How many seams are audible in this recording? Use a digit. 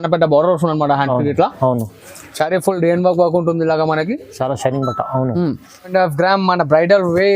1